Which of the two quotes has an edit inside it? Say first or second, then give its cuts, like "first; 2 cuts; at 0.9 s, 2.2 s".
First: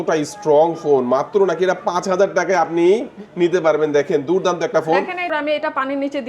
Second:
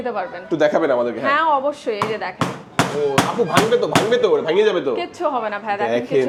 first; 1 cut; at 5.3 s